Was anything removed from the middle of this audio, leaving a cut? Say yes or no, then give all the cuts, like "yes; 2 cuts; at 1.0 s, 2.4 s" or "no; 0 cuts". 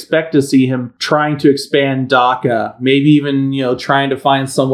yes; 1 cut; at 0.9 s